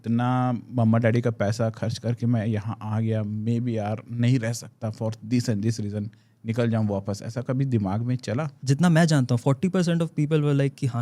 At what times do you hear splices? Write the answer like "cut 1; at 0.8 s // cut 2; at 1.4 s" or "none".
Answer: cut 1; at 8.5 s